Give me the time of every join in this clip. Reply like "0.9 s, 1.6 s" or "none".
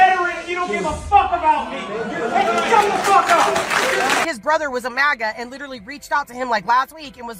4.2 s

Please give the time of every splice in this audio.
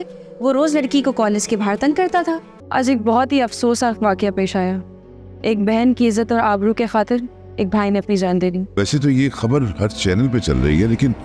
2.5 s, 8.8 s

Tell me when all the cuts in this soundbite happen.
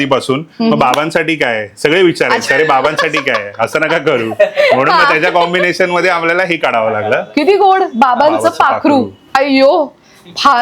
none

